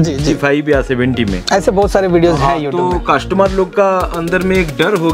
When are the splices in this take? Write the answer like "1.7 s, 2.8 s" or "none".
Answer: none